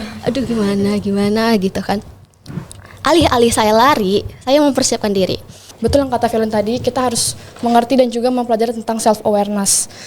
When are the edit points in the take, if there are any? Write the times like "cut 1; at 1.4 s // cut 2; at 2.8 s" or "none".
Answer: cut 1; at 5.7 s